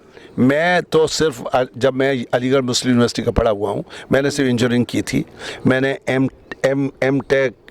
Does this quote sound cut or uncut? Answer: uncut